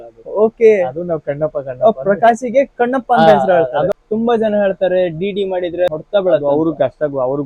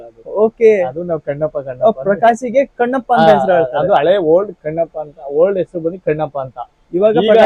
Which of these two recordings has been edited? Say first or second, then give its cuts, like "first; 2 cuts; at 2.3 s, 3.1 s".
first; 2 cuts; at 3.9 s, 5.9 s